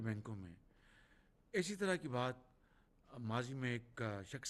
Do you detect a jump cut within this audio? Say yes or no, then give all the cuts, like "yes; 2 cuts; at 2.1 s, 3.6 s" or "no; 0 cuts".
no; 0 cuts